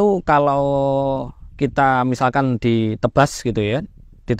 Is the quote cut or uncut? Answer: uncut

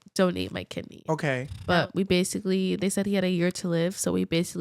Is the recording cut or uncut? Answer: cut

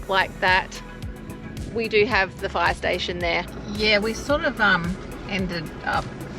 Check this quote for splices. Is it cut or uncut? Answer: cut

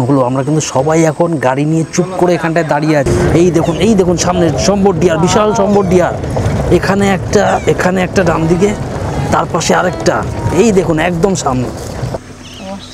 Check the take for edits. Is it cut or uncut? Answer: cut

